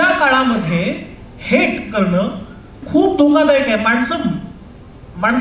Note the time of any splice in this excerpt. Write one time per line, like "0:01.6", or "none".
0:02.8

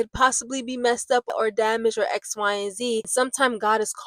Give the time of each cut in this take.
0:01.3
0:03.1

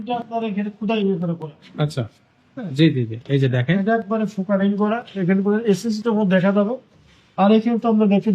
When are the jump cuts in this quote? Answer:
none

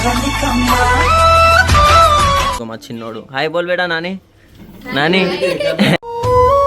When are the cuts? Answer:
0:02.6

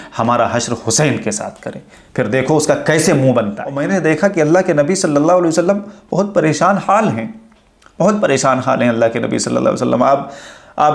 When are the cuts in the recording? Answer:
0:03.7

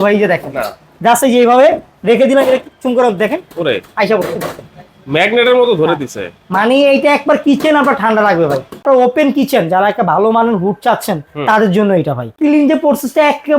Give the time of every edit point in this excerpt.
0:08.8
0:12.3

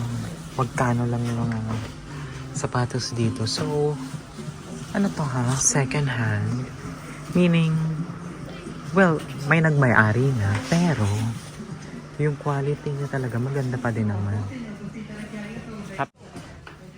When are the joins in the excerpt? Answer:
0:16.1

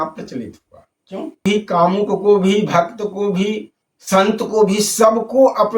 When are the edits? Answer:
0:01.4

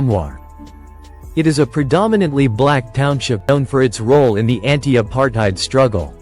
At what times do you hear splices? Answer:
0:03.4

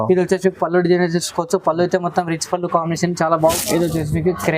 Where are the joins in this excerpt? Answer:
0:03.5

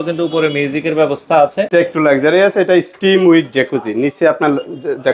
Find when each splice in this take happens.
0:01.7

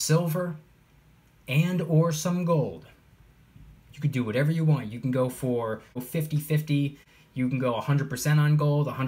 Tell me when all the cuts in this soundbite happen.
0:06.0
0:07.1

